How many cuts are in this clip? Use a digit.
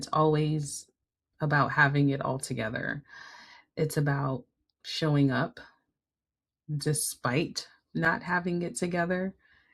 0